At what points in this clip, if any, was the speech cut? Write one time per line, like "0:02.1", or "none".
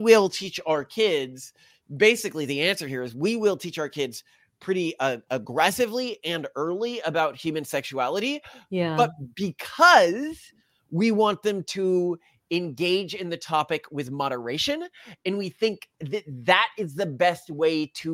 none